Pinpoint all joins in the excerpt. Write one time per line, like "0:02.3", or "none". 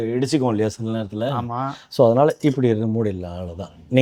none